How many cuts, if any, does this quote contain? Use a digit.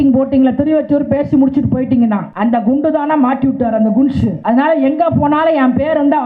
2